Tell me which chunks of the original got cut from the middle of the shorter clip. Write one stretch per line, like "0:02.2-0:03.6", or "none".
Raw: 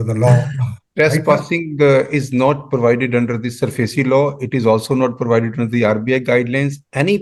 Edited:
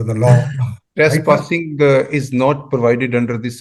none

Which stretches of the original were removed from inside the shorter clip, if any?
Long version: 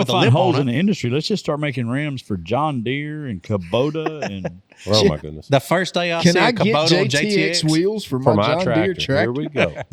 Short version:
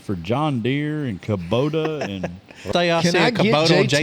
0:04.9-0:05.9

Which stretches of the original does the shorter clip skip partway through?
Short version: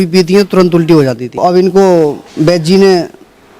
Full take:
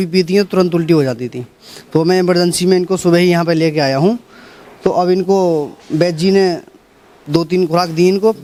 0:01.4-0:04.9

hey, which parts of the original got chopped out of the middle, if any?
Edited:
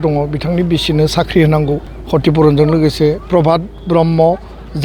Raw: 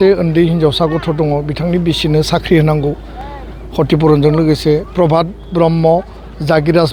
0:03.1-0:03.6

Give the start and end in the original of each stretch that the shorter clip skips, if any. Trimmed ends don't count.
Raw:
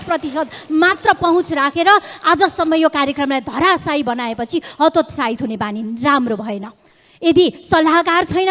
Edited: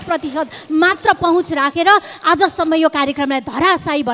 none

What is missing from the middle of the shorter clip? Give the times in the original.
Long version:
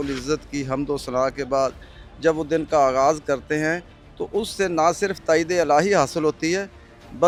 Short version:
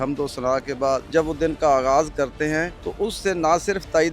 0:01.8-0:02.2
0:03.9-0:04.1

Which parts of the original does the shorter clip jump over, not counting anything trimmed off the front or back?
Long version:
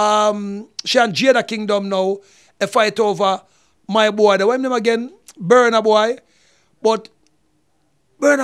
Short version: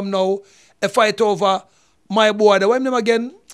none

